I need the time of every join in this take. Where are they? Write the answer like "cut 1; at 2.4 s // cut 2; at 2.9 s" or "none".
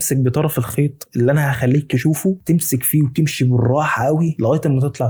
none